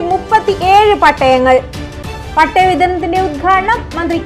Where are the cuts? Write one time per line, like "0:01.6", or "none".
none